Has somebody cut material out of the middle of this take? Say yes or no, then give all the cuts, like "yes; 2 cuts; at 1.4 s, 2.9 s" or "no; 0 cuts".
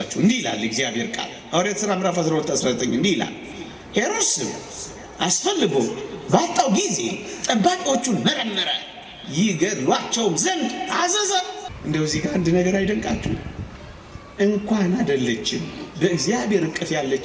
yes; 1 cut; at 11.7 s